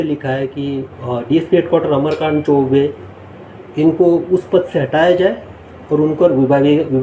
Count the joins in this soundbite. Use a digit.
0